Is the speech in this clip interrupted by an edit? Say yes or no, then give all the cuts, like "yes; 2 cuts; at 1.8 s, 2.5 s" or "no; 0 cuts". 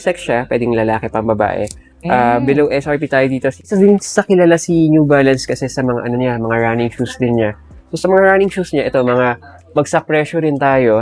yes; 1 cut; at 3.7 s